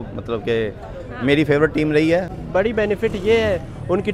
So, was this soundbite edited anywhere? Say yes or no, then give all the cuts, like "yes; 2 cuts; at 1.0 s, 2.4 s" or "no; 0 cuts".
yes; 1 cut; at 2.4 s